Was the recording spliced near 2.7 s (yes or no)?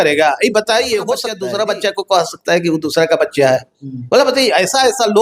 no